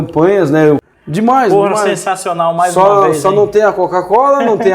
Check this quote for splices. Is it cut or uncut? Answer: cut